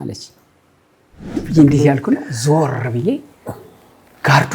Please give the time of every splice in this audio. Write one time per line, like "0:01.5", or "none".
0:01.2